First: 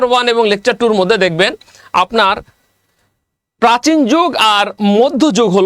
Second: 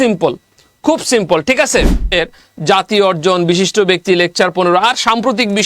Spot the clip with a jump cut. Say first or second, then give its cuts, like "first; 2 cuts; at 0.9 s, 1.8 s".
second; 1 cut; at 2.1 s